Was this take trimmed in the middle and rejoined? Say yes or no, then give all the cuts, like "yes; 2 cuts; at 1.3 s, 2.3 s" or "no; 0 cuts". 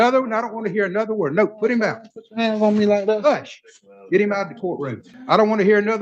yes; 1 cut; at 5.1 s